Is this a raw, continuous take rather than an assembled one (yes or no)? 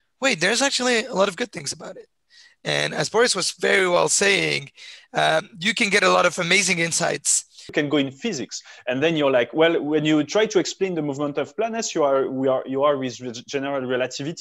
no